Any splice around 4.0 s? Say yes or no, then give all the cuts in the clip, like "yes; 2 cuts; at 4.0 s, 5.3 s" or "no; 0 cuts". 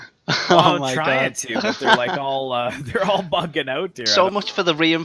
yes; 1 cut; at 4.0 s